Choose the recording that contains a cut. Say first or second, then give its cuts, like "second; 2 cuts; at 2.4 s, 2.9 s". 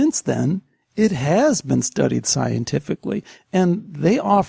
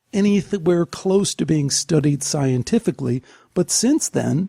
first; 1 cut; at 3.3 s